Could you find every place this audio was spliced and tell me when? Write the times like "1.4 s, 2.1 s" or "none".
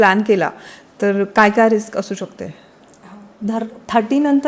none